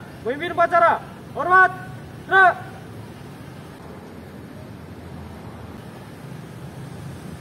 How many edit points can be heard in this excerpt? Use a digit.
0